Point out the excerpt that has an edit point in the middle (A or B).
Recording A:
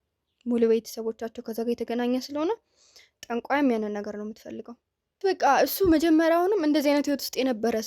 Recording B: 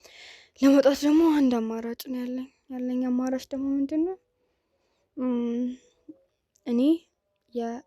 A